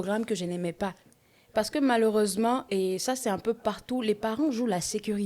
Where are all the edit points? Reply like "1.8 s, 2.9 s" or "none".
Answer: 1.0 s